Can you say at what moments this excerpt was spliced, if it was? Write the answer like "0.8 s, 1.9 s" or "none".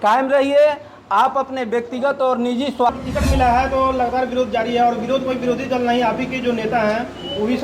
2.9 s